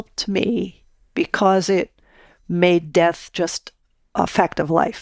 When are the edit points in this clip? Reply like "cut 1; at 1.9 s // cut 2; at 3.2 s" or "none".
none